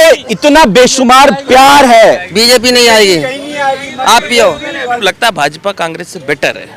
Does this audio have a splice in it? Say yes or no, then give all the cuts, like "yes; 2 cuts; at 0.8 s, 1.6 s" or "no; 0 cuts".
yes; 2 cuts; at 2.3 s, 4.9 s